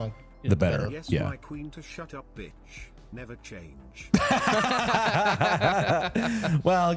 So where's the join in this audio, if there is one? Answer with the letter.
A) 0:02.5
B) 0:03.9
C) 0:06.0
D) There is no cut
D